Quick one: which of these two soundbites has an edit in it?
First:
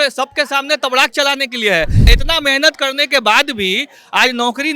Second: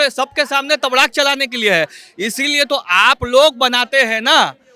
first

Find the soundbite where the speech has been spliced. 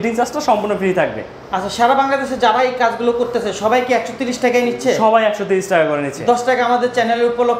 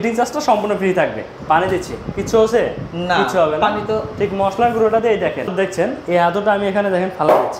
second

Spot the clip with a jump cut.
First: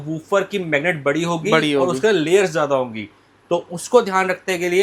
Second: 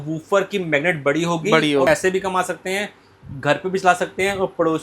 second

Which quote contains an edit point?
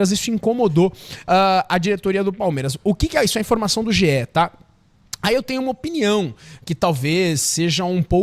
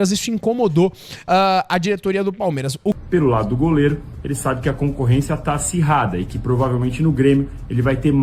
second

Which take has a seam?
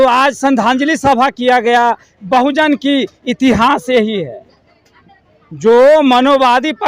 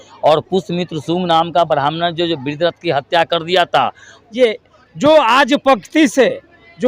second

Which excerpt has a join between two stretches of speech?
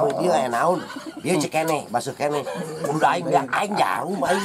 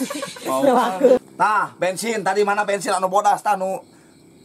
second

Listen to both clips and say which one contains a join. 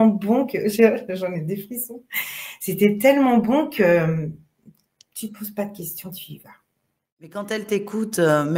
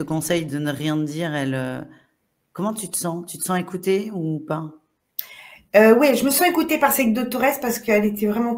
first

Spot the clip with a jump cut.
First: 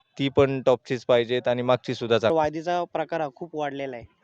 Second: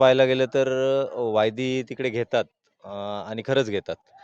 first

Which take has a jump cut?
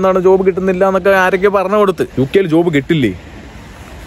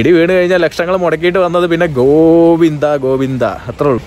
first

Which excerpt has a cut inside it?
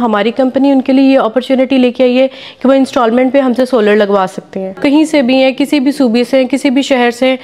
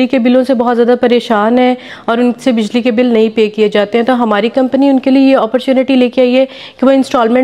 first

